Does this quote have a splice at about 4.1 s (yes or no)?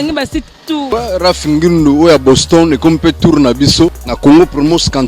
yes